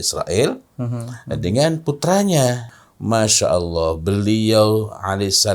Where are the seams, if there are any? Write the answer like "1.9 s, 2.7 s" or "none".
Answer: 2.8 s

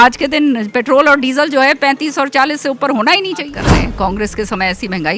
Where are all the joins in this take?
3.6 s

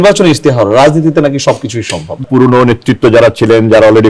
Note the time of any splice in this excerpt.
2.2 s

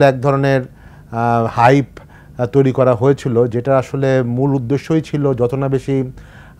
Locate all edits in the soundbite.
none

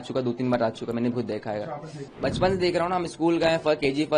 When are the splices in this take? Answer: 2.1 s

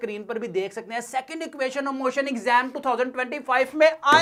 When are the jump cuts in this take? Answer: none

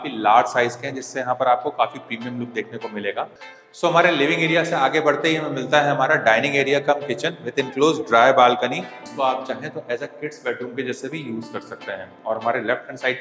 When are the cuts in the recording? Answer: 3.5 s, 9.0 s, 12.1 s

